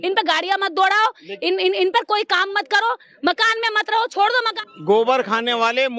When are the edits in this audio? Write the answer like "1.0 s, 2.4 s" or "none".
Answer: 4.6 s